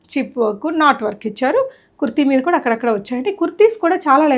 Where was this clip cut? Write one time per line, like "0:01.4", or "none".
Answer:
none